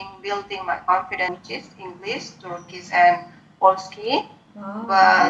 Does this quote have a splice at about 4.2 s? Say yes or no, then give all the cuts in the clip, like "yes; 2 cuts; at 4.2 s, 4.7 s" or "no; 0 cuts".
no; 1 cut; at 1.3 s